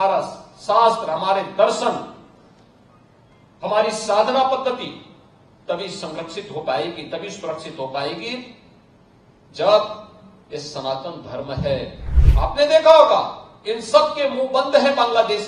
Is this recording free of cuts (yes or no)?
no